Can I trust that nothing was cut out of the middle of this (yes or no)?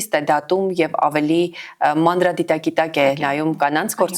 yes